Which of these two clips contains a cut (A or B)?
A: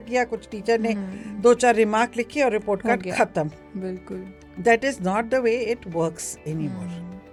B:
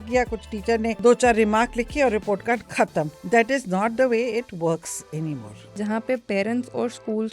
B